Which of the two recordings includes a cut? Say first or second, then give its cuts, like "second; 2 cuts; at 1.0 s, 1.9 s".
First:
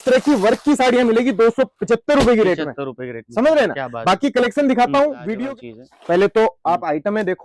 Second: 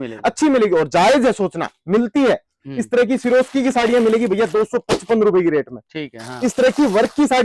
first; 1 cut; at 5.3 s